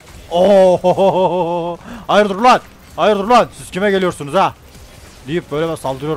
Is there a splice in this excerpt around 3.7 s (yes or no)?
no